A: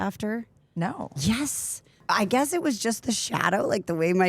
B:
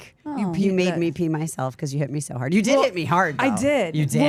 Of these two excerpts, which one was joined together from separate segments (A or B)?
A